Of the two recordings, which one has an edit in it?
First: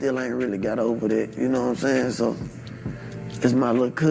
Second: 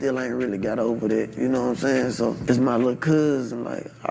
second; 1 cut; at 2.4 s

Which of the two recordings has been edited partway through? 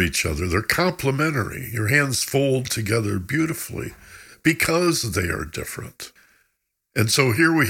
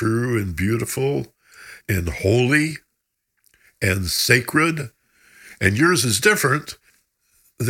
first; 1 cut; at 6.1 s

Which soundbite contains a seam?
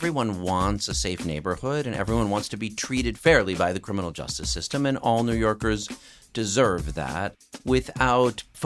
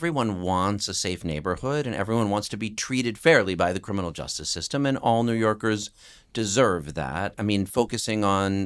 first; 1 cut; at 7.3 s

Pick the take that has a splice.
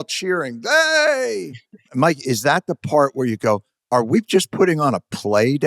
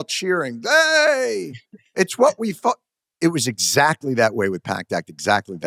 first; 2 cuts; at 1.8 s, 3.7 s

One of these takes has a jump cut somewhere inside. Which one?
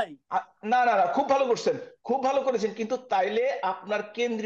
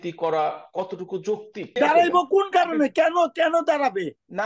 second; 1 cut; at 1.7 s

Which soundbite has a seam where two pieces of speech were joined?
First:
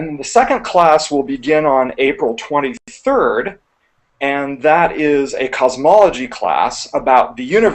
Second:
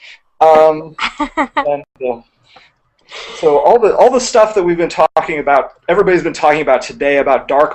first; 1 cut; at 5.1 s

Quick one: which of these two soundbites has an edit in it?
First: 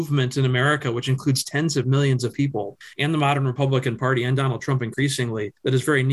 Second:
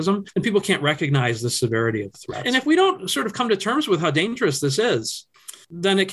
second; 1 cut; at 2.3 s

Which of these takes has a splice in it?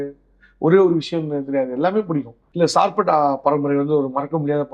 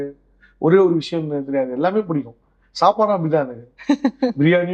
first; 1 cut; at 2.4 s

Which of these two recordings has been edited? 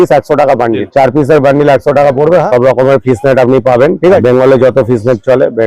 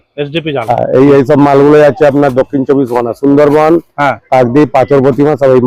first; 3 cuts; at 0.8 s, 2.5 s, 4.2 s

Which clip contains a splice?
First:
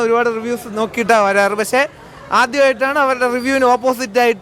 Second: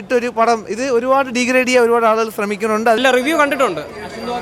second; 1 cut; at 3.0 s

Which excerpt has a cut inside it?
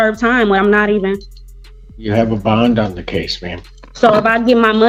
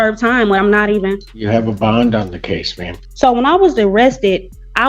second; 2 cuts; at 1.3 s, 3.0 s

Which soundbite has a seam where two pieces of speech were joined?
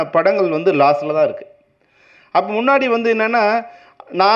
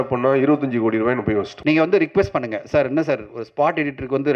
second; 1 cut; at 1.5 s

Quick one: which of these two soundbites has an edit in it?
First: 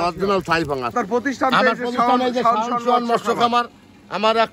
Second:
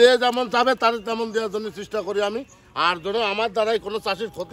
first; 1 cut; at 0.9 s

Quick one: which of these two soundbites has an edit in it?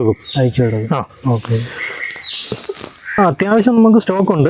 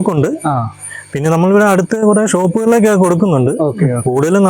first; 1 cut; at 3.2 s

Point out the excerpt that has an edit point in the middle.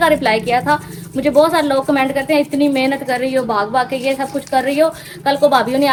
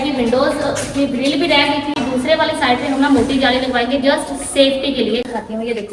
second; 1 cut; at 1.9 s

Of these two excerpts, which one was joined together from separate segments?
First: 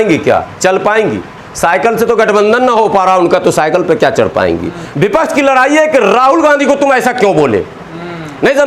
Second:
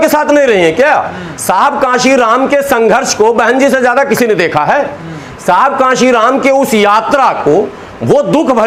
first; 1 cut; at 4.8 s

